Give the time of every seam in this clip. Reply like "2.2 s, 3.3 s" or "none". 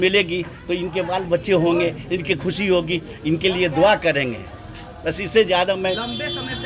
none